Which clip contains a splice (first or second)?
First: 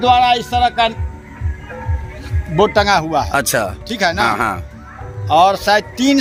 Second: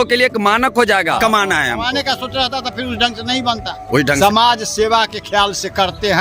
second